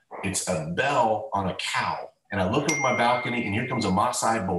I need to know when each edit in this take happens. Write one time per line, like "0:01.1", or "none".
0:02.1